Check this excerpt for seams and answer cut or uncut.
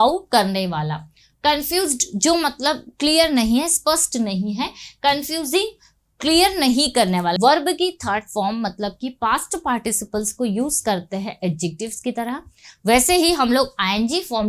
cut